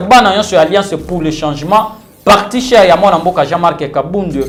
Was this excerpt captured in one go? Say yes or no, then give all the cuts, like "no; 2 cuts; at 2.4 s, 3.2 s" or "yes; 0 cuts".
yes; 0 cuts